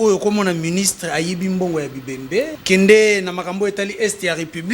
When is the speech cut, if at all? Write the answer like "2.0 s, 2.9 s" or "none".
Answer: 2.6 s